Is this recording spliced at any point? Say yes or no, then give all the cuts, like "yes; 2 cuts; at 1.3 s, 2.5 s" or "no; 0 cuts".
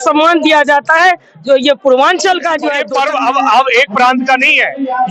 yes; 1 cut; at 2.7 s